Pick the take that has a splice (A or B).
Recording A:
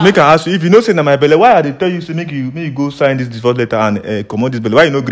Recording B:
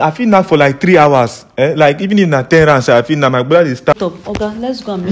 B